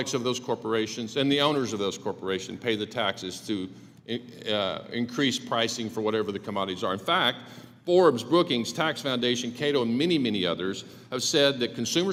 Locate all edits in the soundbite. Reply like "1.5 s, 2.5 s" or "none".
none